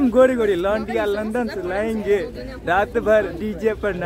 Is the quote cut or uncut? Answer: uncut